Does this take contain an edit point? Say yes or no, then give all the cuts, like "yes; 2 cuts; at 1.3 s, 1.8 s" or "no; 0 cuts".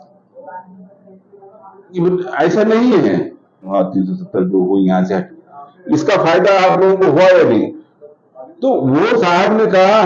yes; 1 cut; at 3.7 s